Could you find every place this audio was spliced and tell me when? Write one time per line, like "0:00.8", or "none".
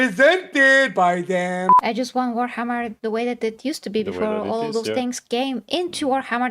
0:01.7
0:02.9